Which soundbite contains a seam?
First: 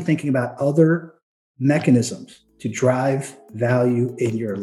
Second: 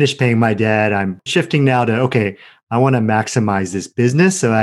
second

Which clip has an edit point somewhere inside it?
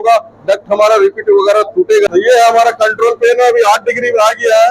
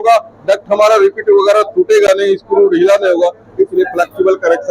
first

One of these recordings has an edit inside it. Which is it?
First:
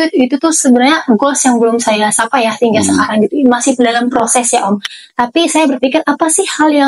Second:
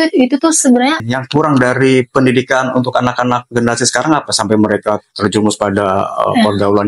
second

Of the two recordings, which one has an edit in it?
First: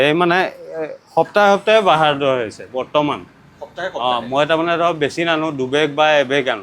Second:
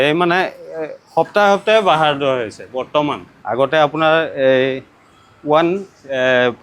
second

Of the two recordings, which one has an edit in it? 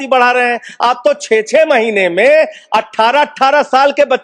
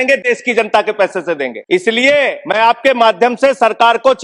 second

